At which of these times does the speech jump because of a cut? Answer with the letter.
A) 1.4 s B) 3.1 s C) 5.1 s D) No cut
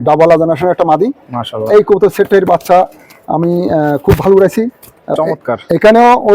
C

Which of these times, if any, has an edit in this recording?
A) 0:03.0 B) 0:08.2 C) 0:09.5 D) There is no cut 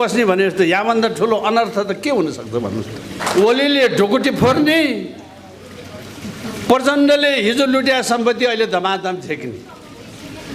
A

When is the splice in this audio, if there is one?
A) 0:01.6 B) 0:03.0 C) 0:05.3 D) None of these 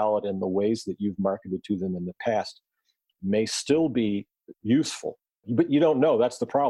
C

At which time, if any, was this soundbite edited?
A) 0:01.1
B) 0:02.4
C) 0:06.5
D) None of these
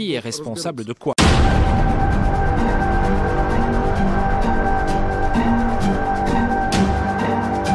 D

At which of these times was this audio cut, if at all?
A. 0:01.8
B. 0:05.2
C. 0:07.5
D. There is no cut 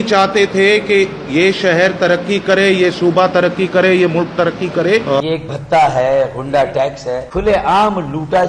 B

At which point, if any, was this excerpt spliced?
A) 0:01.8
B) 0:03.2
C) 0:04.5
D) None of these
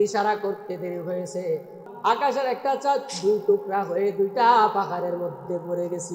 A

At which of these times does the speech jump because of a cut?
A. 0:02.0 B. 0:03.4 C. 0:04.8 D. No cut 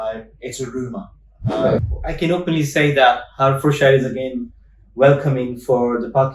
A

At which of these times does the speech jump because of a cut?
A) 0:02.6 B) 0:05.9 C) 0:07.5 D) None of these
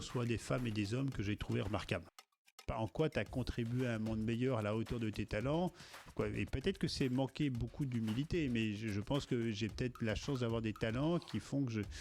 A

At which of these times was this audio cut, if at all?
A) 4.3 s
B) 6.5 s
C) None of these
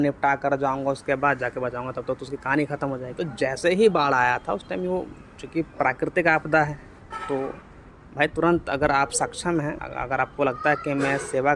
C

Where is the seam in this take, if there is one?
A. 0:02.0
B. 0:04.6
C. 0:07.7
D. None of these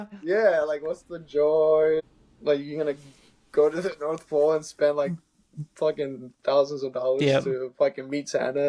A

